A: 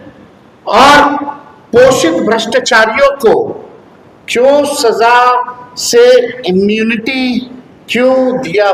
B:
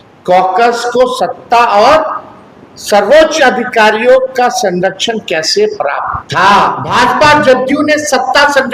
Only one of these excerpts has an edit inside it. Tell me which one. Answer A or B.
B